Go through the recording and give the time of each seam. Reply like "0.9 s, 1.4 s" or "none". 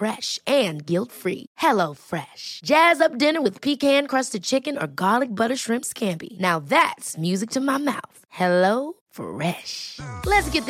none